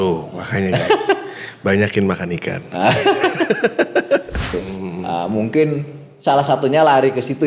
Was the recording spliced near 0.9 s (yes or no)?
no